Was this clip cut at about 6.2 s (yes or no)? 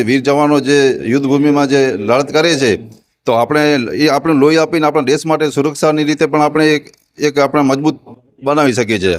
no